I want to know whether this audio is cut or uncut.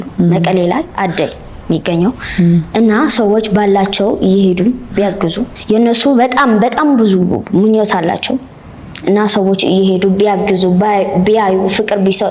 uncut